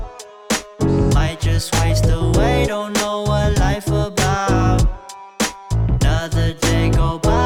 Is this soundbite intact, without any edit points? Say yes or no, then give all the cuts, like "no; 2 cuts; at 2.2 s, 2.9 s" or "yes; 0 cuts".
yes; 0 cuts